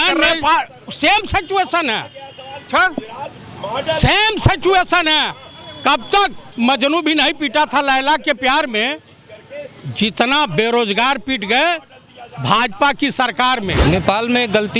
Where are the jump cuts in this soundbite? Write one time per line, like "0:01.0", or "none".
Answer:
0:06.4